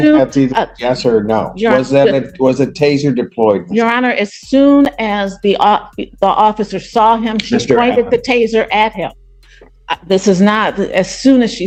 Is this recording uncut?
yes; 0 cuts

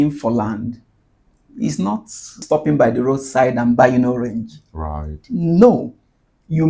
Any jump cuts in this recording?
yes; 1 cut; at 2.4 s

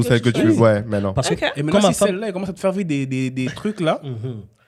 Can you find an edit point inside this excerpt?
no; 0 cuts

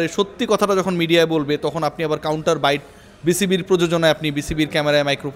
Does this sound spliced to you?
no; 0 cuts

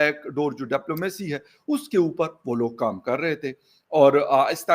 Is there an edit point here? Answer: no; 0 cuts

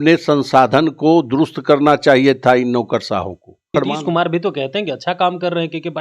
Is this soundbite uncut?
no; 1 cut; at 3.7 s

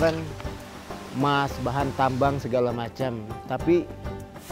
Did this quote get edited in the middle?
no; 0 cuts

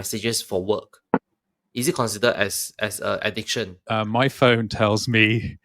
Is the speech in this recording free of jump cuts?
no; 1 cut; at 3.9 s

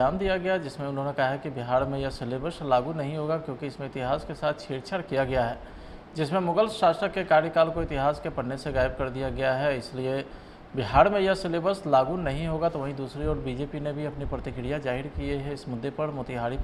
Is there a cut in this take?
no; 0 cuts

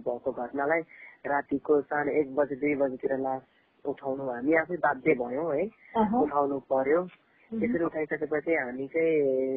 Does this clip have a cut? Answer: no; 0 cuts

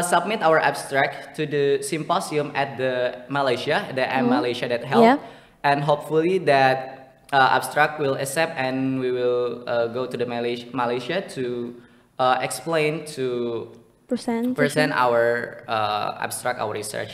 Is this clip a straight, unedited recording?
yes; 0 cuts

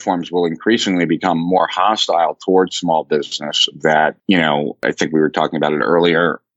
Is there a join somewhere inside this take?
yes; 1 cut; at 4.8 s

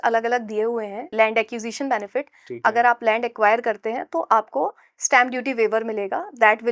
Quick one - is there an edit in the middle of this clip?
yes; 1 cut; at 1.0 s

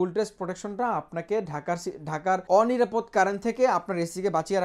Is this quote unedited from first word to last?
no; 1 cut; at 2.4 s

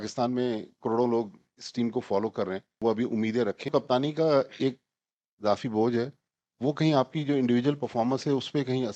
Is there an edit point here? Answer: yes; 2 cuts; at 2.6 s, 3.7 s

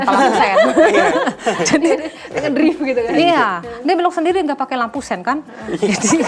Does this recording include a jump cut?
no; 0 cuts

